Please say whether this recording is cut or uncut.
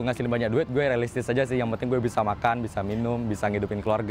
uncut